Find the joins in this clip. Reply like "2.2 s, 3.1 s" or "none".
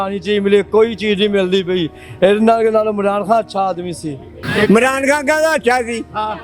4.4 s